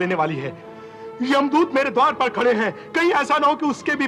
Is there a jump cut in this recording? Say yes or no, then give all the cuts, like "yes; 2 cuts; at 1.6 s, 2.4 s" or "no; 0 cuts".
no; 0 cuts